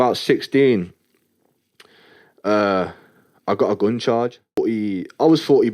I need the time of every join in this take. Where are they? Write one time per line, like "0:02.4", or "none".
0:04.6

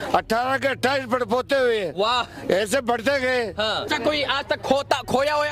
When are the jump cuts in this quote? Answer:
0:03.9

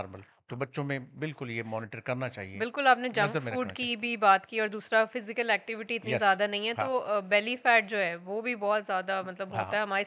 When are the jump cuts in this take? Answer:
none

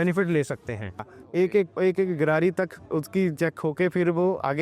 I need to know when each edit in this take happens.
0:01.0

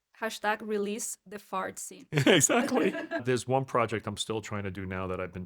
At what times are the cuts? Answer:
0:02.6

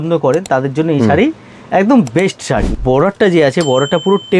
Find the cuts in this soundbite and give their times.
0:02.7

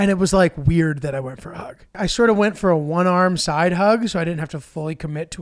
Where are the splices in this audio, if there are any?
0:01.9

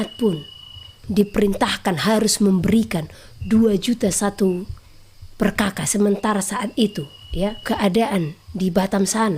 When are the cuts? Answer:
0:07.6

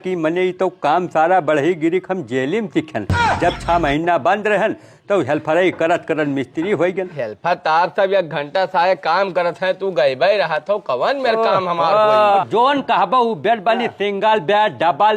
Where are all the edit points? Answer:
0:07.2
0:12.4

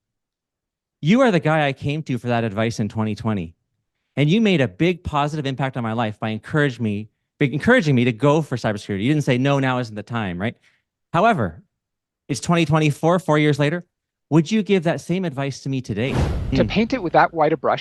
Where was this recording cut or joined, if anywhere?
0:16.5

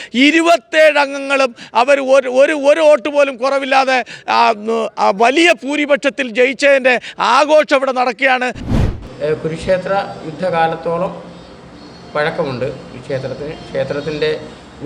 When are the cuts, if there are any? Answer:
0:08.6

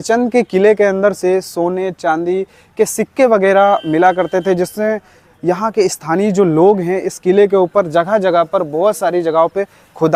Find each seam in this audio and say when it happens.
none

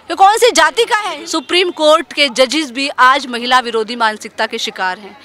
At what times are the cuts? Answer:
0:01.0

